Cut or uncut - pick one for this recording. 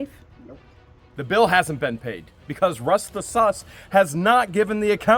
cut